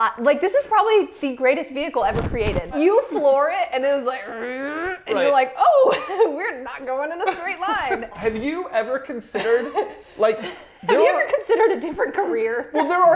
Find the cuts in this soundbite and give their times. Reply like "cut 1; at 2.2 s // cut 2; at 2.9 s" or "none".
cut 1; at 2.8 s // cut 2; at 8.1 s